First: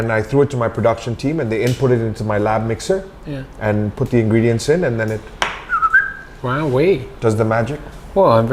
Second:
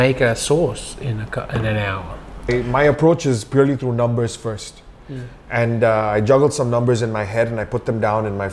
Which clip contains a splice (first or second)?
second